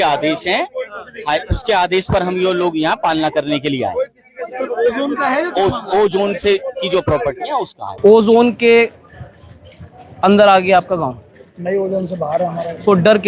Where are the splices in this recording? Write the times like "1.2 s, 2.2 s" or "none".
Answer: 7.8 s